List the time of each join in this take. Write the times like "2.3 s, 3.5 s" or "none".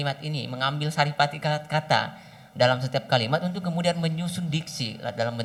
none